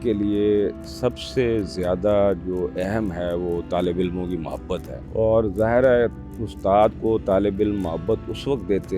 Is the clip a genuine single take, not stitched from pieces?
no; 1 cut; at 5.0 s

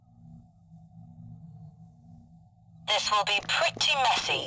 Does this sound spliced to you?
yes; 1 cut; at 2.8 s

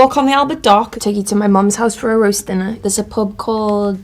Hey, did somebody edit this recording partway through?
yes; 2 cuts; at 0.9 s, 2.7 s

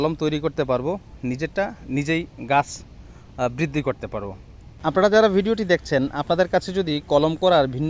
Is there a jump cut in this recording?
yes; 1 cut; at 4.6 s

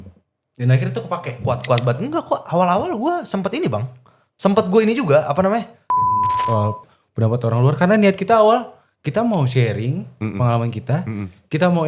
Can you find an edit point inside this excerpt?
yes; 2 cuts; at 1.4 s, 6.5 s

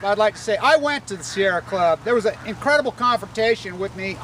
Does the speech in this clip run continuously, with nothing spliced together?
yes; 0 cuts

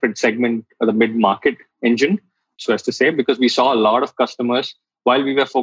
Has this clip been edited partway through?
yes; 1 cut; at 2.6 s

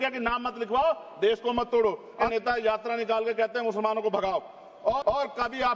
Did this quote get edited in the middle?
yes; 2 cuts; at 2.3 s, 5.0 s

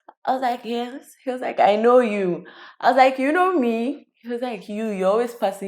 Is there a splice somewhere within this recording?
no; 0 cuts

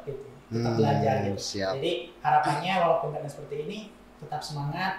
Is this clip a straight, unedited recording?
yes; 0 cuts

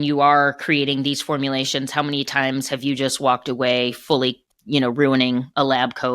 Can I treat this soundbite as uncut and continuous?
no; 1 cut; at 4.5 s

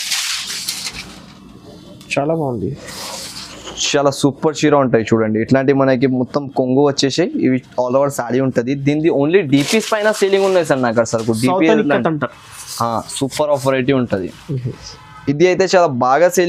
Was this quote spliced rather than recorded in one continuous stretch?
no; 0 cuts

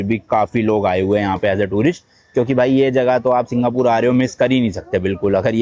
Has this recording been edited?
no; 0 cuts

